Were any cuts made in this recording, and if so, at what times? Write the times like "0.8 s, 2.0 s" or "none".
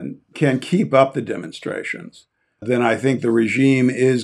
2.6 s